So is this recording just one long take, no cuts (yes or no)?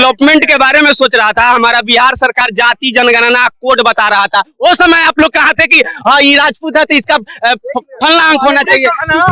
yes